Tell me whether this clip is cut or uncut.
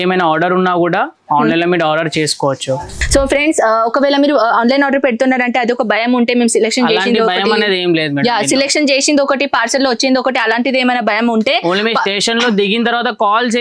cut